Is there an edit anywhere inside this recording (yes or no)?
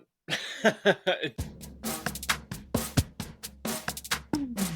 yes